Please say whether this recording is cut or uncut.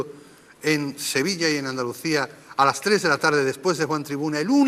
uncut